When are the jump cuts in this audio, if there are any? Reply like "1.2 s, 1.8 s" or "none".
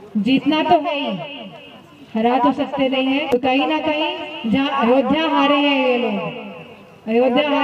3.4 s

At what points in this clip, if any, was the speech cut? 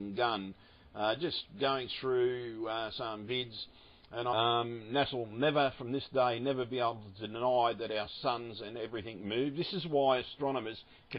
none

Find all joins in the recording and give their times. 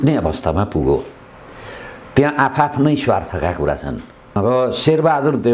4.4 s

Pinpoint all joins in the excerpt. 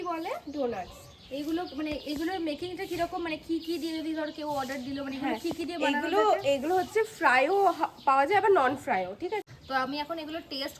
9.4 s

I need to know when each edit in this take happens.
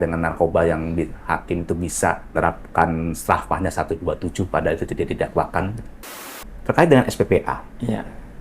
2.3 s, 6.3 s

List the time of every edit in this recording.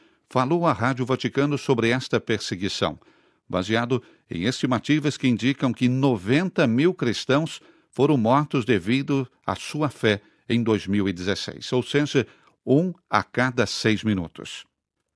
none

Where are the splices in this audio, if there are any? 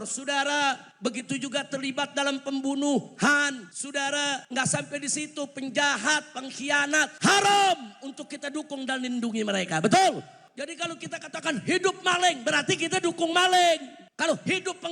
0.9 s, 4.2 s, 7.1 s, 10.4 s, 14.0 s

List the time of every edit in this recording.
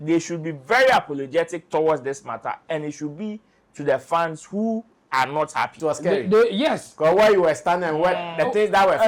5.7 s

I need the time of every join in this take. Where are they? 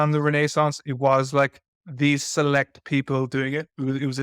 none

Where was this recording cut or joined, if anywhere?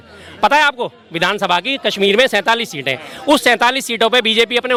none

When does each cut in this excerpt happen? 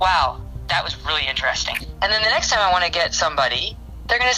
1.8 s

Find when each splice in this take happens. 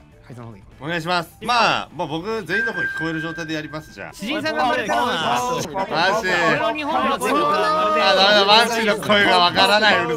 1.3 s, 4.0 s, 5.6 s

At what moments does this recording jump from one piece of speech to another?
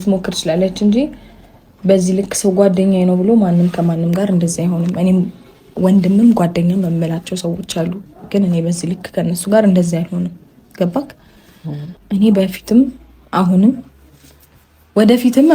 11.9 s

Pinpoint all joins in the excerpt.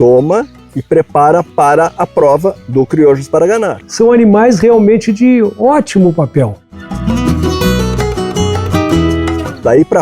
none

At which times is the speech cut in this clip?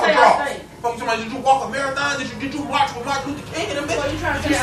none

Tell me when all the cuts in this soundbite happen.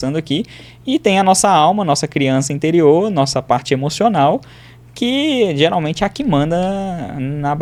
none

